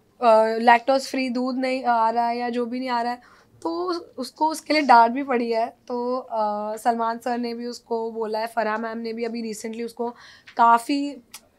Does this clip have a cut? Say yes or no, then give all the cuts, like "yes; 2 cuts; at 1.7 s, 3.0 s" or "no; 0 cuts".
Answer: no; 0 cuts